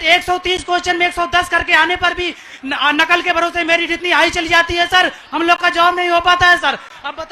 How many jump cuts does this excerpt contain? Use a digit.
0